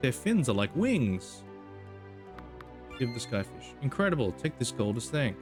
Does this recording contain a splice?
no; 0 cuts

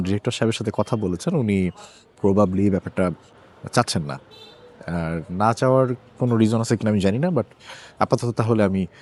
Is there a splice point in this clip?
no; 0 cuts

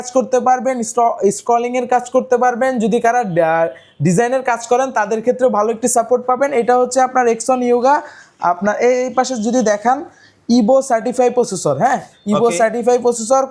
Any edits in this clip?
no; 0 cuts

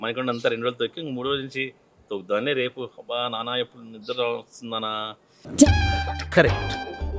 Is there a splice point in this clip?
no; 0 cuts

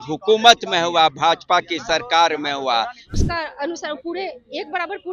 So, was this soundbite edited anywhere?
yes; 1 cut; at 3.1 s

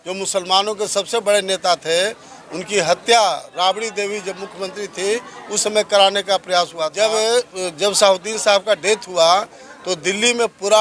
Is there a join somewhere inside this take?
yes; 1 cut; at 6.9 s

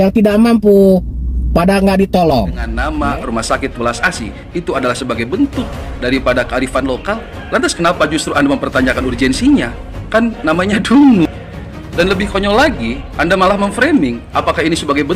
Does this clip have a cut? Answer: yes; 1 cut; at 2.7 s

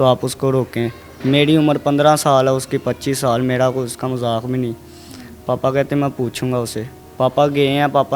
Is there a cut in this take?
no; 0 cuts

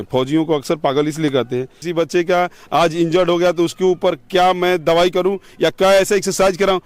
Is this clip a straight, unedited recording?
no; 1 cut; at 1.8 s

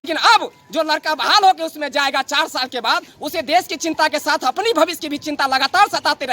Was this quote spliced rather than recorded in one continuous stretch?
no; 0 cuts

